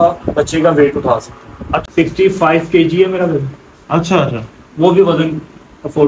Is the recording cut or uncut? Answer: cut